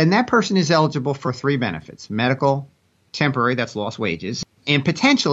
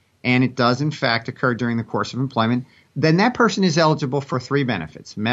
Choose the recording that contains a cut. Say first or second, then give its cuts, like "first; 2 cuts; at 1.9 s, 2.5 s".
first; 1 cut; at 4.4 s